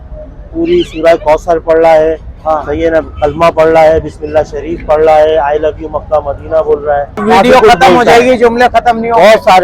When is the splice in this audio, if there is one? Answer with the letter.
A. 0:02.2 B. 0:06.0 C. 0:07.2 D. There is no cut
C